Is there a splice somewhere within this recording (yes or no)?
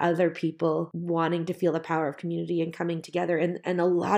yes